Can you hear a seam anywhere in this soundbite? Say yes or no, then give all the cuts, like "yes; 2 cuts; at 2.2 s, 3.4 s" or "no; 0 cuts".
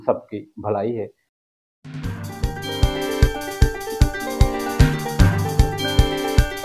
yes; 1 cut; at 1.2 s